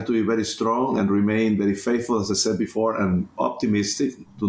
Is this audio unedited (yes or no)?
yes